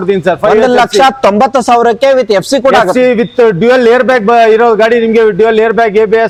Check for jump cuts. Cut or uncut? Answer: uncut